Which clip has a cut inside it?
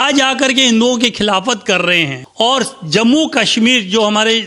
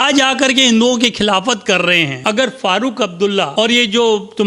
second; 1 cut; at 2.1 s

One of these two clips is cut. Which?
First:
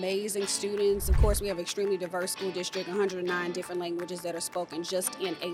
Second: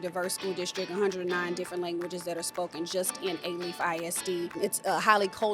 second; 1 cut; at 4.6 s

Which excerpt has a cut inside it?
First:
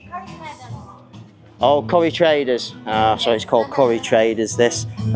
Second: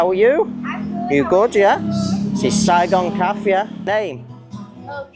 second; 1 cut; at 3.9 s

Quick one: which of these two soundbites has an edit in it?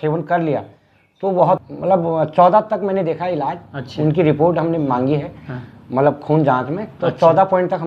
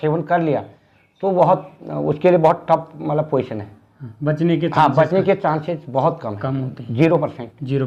first; 1 cut; at 1.7 s

